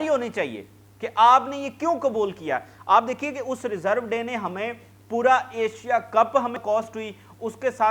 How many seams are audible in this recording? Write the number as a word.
one